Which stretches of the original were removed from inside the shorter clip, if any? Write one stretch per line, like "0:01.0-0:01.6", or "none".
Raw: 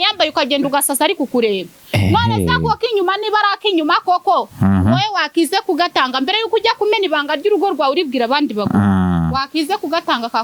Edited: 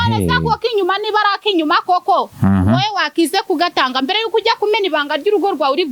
none